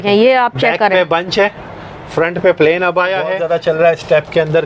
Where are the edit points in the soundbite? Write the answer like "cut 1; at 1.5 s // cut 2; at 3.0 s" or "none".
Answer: cut 1; at 3.4 s